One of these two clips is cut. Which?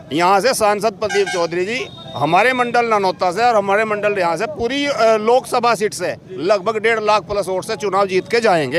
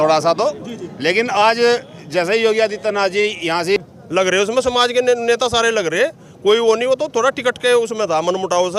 second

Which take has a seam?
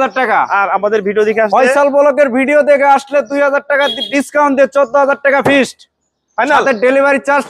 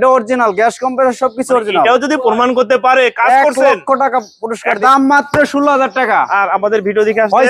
second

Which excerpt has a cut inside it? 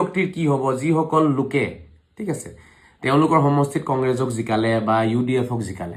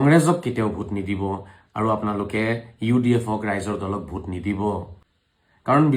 second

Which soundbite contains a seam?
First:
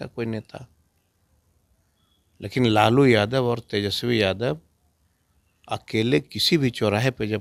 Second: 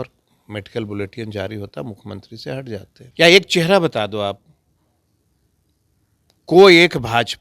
second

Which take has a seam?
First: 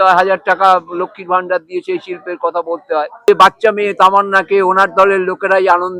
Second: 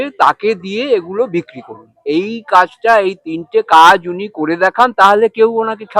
first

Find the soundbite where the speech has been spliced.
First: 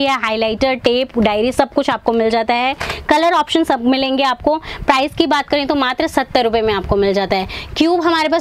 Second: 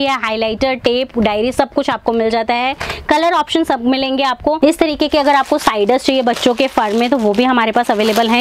second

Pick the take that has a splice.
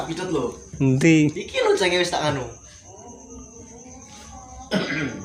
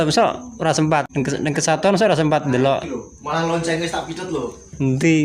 second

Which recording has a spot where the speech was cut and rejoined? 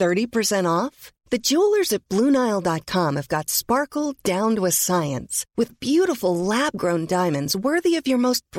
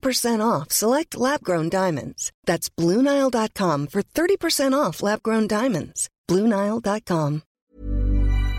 second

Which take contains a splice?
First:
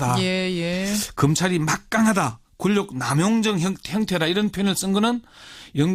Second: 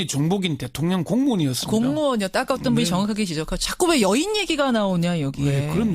second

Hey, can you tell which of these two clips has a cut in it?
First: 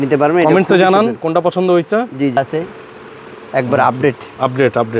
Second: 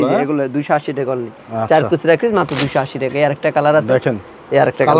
first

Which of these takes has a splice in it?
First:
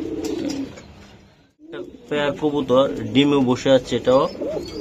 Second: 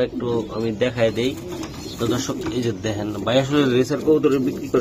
first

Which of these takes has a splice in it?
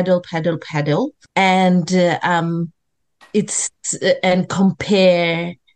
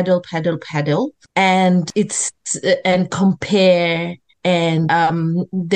second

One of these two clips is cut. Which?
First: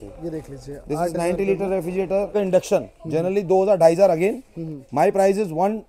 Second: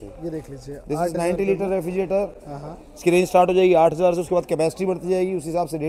first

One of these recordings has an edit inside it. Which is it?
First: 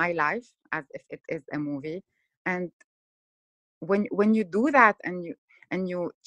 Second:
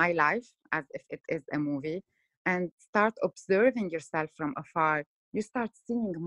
second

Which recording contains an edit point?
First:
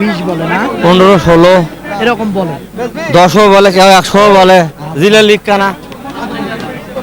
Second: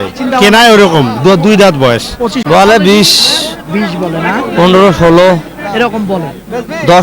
second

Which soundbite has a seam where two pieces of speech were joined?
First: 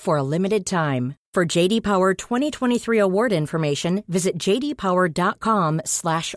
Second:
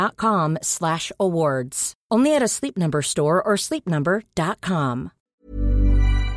second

